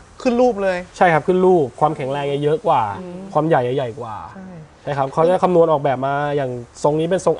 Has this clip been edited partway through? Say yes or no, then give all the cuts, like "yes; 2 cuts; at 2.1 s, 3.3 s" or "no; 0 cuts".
no; 0 cuts